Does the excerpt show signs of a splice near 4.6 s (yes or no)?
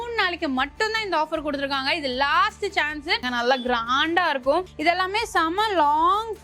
yes